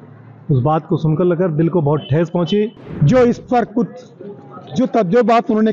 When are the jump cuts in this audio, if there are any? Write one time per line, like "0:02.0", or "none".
0:02.8